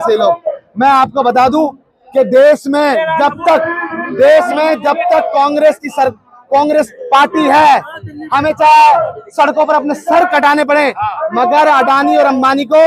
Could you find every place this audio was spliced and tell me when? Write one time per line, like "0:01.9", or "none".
none